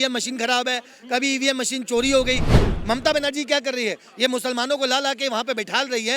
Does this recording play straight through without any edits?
no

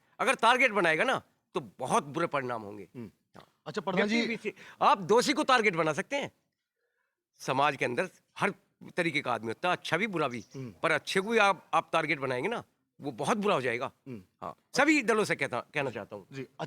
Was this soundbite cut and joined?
no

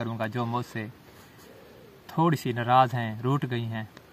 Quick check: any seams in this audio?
no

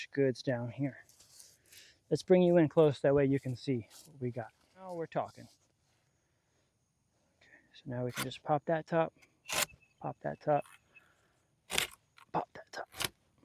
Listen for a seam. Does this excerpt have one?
yes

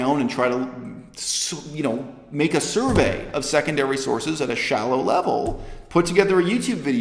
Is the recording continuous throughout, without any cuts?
yes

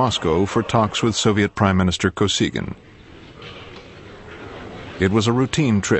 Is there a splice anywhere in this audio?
yes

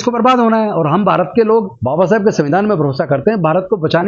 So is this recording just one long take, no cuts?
no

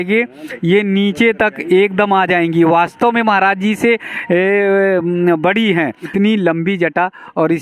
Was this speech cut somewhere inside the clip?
yes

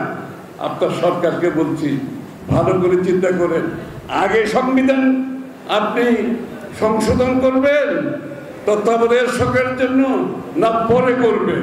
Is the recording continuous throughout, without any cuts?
yes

